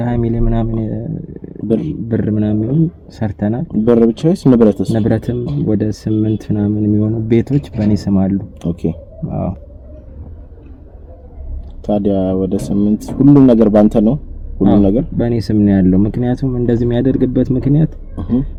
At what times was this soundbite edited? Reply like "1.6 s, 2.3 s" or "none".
none